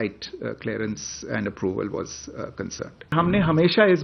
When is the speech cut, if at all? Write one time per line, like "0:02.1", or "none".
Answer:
0:03.1